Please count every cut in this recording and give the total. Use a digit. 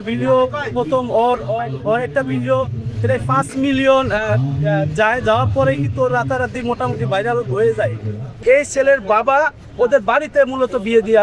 1